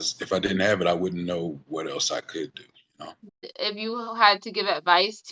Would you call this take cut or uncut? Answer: cut